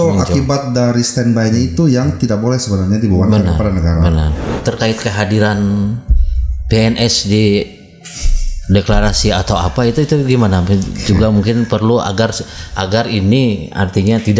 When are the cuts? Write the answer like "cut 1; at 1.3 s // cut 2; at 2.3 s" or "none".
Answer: cut 1; at 4.5 s